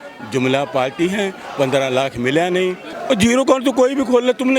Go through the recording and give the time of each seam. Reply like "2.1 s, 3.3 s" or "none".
2.9 s